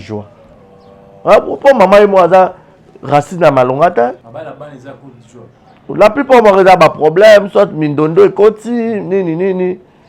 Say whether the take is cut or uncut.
cut